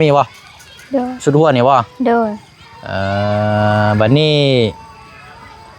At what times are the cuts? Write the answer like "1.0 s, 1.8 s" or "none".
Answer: none